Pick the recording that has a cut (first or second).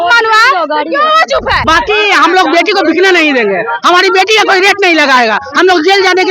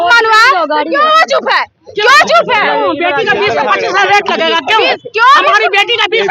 first